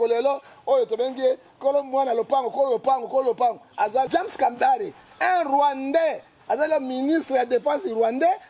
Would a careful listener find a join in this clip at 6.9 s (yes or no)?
no